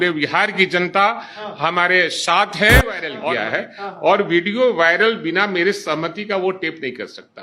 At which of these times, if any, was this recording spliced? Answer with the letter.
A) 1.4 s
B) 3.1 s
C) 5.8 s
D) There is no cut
B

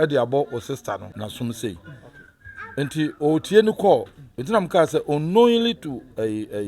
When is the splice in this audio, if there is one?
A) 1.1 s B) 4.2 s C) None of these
A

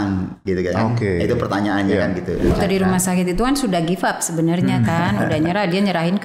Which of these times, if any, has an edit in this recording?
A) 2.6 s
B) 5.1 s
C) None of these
A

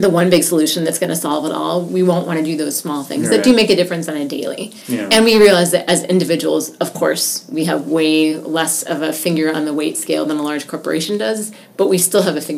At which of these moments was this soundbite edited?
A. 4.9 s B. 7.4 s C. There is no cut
C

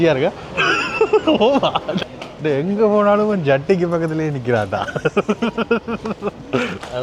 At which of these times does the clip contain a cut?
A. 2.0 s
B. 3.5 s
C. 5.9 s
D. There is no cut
A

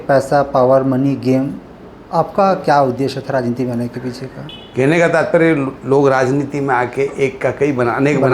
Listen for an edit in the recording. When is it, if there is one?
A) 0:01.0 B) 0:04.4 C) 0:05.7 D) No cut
B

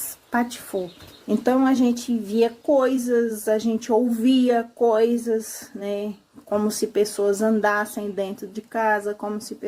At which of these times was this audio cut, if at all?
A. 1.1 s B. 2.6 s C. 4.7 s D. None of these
A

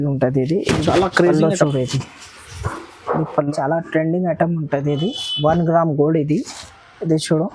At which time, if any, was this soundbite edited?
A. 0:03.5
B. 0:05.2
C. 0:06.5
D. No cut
A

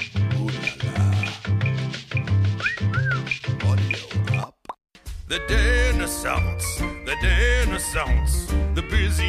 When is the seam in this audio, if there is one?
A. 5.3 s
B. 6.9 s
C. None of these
A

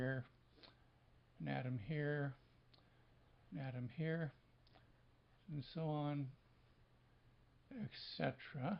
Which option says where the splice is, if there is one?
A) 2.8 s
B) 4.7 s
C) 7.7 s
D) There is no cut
D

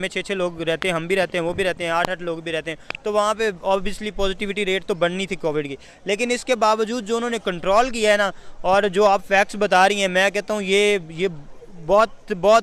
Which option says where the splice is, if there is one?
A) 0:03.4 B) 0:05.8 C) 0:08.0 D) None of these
D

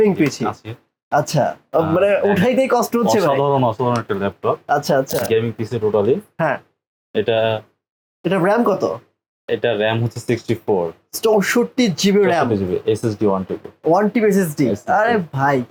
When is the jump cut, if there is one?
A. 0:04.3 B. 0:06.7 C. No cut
C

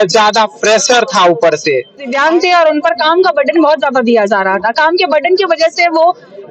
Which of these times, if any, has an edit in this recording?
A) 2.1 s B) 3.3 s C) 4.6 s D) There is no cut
A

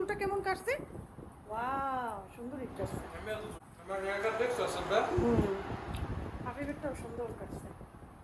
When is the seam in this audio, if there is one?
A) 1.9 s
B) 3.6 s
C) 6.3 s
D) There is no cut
B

